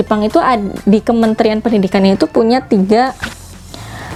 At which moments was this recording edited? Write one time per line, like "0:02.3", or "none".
none